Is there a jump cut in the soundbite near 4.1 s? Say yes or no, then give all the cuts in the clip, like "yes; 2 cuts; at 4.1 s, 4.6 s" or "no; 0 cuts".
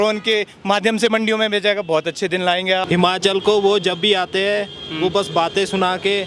no; 1 cut; at 2.8 s